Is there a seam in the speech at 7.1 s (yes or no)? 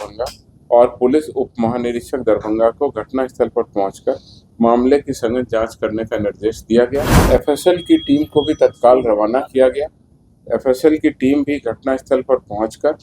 yes